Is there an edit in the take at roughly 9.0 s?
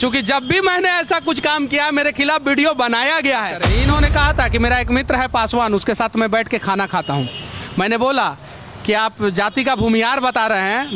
no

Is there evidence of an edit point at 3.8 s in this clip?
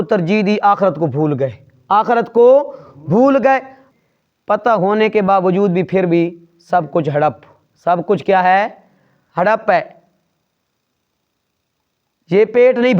yes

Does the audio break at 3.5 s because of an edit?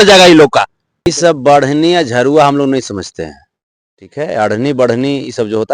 no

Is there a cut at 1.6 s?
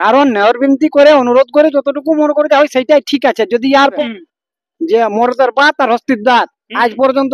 no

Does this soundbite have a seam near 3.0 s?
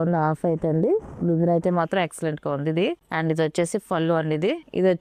no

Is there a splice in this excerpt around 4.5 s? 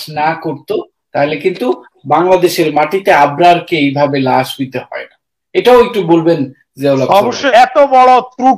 no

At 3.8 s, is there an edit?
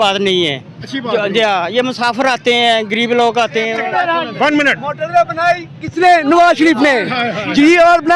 yes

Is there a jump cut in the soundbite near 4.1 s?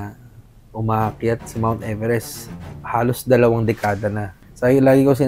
yes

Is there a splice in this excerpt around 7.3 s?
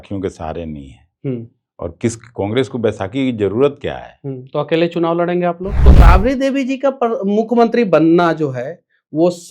no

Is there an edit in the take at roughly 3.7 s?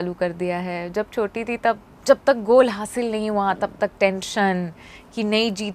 no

